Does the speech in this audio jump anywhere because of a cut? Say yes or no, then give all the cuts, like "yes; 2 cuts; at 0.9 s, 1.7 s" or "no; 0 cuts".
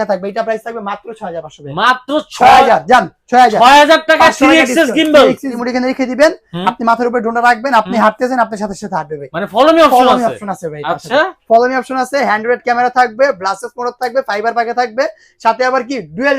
yes; 1 cut; at 5.6 s